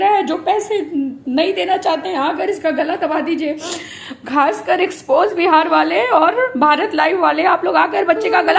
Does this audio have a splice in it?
no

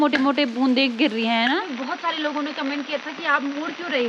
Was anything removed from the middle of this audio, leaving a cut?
yes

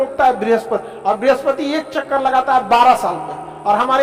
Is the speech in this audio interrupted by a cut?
yes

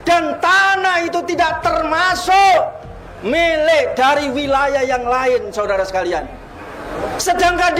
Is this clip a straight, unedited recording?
yes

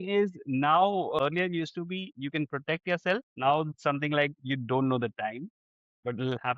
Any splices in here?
yes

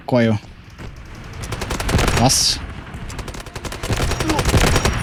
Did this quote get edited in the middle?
no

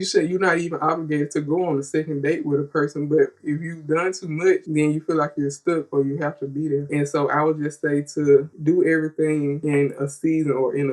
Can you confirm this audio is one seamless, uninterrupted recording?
yes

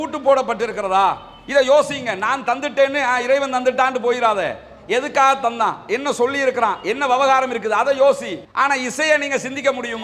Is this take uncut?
yes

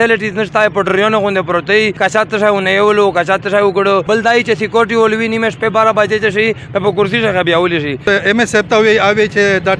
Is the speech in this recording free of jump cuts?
no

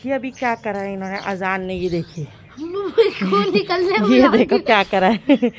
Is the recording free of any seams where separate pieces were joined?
yes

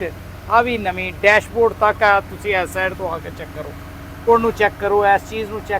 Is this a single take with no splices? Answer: no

